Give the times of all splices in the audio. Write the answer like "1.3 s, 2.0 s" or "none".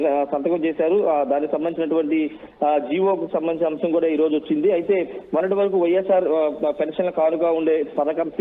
none